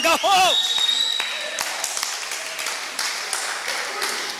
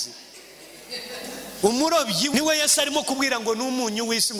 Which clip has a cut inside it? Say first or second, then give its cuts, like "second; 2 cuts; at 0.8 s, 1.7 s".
second; 1 cut; at 2.3 s